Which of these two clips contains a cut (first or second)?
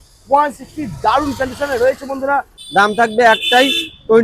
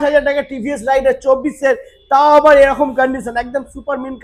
first